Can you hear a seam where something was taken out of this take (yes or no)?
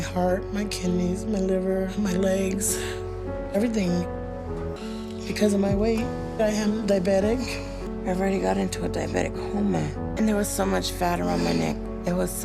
no